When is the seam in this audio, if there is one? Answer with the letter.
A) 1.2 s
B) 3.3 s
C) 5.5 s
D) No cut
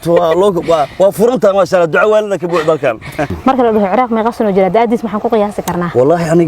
B